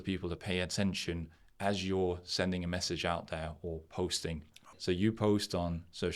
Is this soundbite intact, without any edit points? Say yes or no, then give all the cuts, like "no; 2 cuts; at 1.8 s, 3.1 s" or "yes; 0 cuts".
no; 1 cut; at 4.8 s